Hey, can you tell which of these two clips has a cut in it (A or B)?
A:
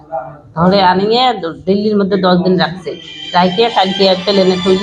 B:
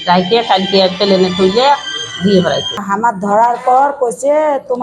B